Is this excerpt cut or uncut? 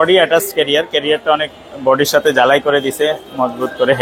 uncut